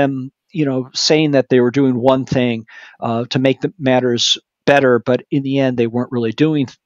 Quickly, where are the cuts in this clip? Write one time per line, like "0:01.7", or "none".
none